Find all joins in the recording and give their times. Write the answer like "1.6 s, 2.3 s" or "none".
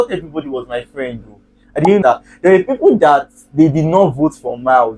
2.0 s